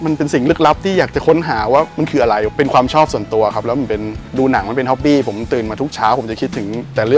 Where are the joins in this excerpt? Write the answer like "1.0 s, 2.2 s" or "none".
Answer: 2.5 s, 4.2 s